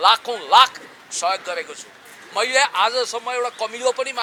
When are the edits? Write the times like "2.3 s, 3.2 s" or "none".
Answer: none